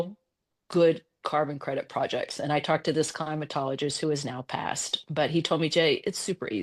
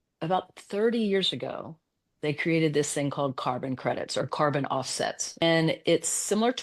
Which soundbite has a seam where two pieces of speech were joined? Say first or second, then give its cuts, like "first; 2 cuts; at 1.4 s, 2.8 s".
second; 1 cut; at 5.4 s